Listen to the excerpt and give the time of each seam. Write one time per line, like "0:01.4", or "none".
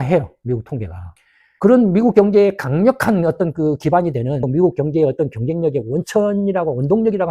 0:04.4